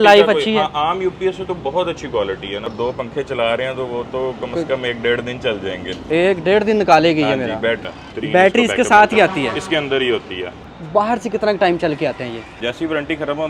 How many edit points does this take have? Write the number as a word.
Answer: four